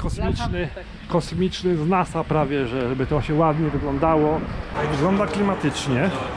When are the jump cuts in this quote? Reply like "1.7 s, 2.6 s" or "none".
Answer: 4.7 s